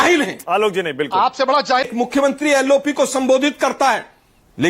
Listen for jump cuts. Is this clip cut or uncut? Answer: cut